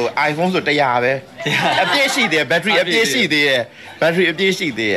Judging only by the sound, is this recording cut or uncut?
uncut